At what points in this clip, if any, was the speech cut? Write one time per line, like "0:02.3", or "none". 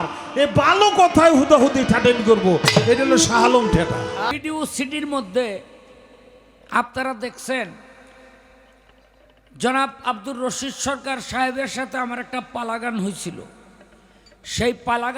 0:04.3